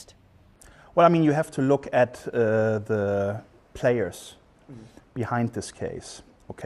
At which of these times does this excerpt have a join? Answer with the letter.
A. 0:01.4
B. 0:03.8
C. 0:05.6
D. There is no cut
B